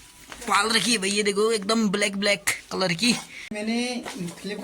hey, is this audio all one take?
no; 1 cut; at 3.3 s

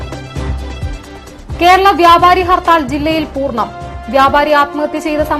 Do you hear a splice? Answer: yes; 1 cut; at 0.9 s

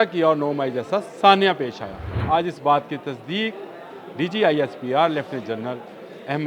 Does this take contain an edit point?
yes; 1 cut; at 2.1 s

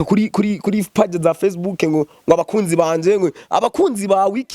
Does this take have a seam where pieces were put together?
no; 0 cuts

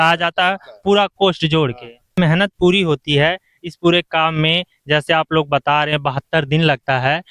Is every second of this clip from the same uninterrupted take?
no; 1 cut; at 2.2 s

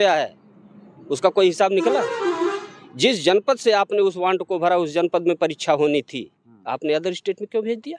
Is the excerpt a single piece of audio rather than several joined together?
yes; 0 cuts

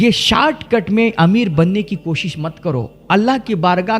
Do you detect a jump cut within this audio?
yes; 1 cut; at 3.0 s

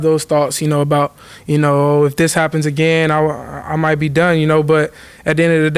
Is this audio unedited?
yes; 0 cuts

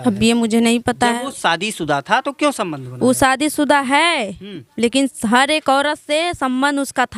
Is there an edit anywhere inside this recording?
no; 0 cuts

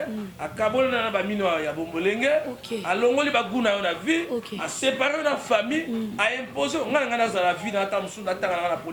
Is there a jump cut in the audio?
no; 0 cuts

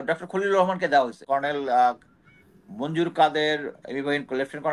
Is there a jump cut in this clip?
yes; 1 cut; at 1.2 s

